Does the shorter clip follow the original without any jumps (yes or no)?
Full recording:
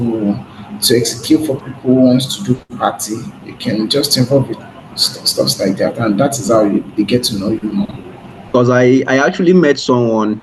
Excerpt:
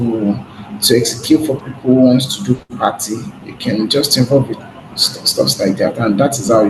yes